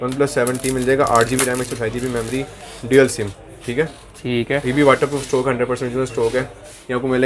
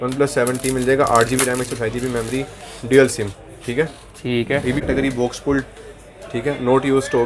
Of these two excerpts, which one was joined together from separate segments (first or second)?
second